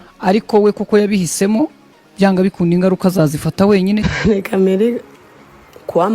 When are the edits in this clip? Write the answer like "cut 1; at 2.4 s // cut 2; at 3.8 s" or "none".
cut 1; at 4.1 s